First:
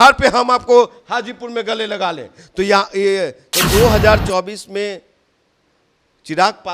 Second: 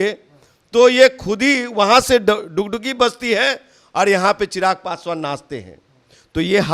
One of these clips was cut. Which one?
first; 1 cut; at 3.4 s

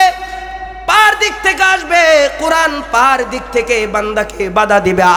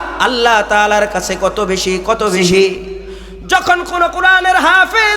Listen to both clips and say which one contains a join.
second; 1 cut; at 2.4 s

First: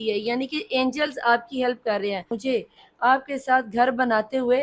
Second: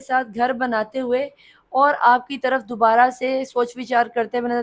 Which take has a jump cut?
first; 1 cut; at 2.3 s

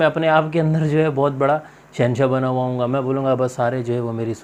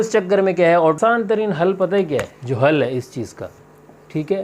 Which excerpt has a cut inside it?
second; 1 cut; at 1.0 s

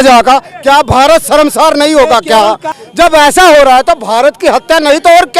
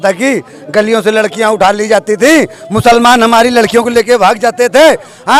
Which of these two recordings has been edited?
first; 1 cut; at 2.7 s

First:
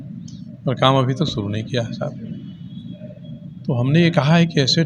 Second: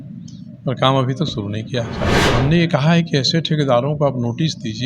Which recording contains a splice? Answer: second; 1 cut; at 2.2 s

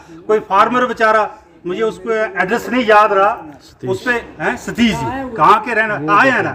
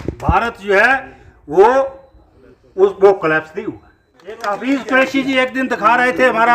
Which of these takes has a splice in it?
second; 1 cut; at 4.5 s

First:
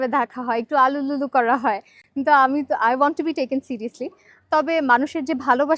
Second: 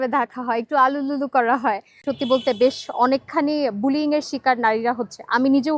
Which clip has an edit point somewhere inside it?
second; 1 cut; at 2.0 s

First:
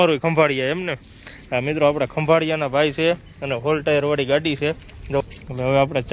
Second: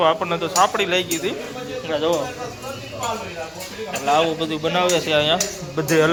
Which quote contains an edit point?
first; 1 cut; at 5.2 s

